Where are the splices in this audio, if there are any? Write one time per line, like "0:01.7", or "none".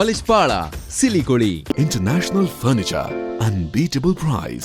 0:01.7